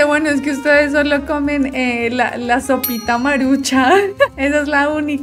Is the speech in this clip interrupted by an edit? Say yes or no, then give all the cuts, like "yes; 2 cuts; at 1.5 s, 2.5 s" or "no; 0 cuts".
no; 0 cuts